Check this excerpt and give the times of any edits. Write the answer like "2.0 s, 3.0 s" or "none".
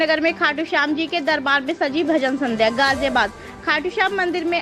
none